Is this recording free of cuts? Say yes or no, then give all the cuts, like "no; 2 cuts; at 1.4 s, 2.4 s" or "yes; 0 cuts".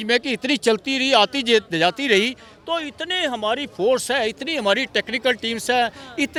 yes; 0 cuts